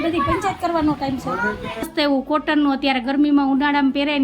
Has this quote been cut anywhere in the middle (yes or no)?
yes